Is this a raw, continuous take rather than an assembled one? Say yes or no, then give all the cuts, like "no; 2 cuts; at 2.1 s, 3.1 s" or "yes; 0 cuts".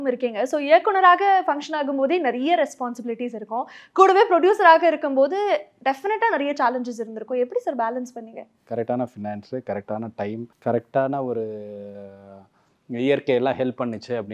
no; 2 cuts; at 8.6 s, 10.5 s